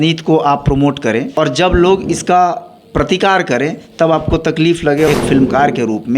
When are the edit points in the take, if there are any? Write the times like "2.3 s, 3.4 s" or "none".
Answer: 1.3 s, 5.1 s